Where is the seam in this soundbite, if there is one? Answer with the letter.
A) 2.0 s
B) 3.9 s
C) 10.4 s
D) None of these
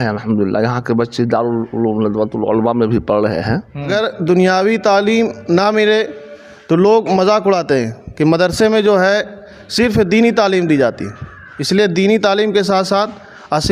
B